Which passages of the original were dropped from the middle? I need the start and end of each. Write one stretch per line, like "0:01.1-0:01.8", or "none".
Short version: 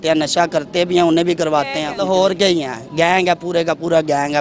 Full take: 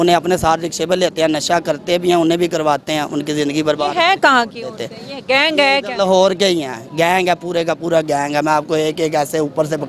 0:03.0-0:05.9